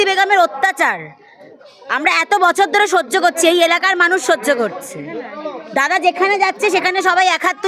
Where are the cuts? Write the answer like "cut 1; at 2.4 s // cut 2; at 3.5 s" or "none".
none